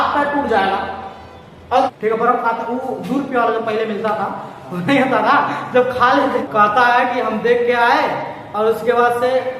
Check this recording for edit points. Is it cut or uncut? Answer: cut